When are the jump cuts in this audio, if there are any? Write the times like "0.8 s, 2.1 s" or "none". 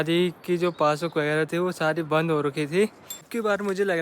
3.0 s